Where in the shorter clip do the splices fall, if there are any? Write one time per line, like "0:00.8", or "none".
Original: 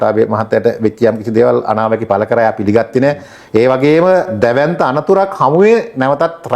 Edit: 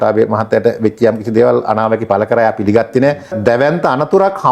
0:03.3